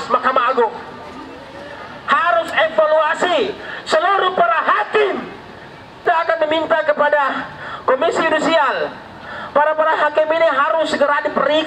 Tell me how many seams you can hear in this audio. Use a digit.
1